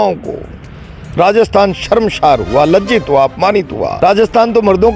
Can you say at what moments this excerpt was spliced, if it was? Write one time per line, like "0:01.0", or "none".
0:03.8

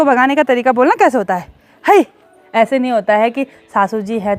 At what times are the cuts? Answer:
0:02.4

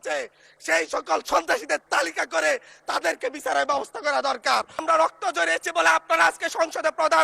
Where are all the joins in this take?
0:04.8

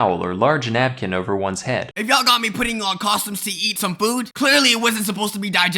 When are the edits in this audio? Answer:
0:01.9
0:03.6

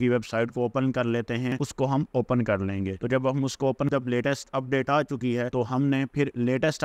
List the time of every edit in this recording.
0:01.5
0:03.9

